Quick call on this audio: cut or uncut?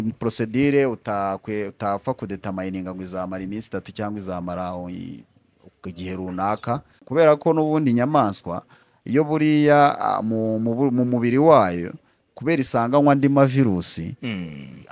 cut